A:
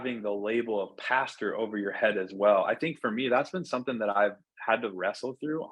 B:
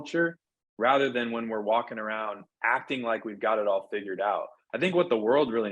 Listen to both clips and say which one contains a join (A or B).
B